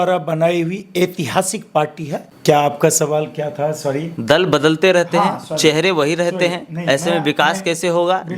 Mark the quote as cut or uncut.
cut